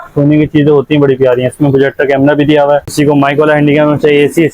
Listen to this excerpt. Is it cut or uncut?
cut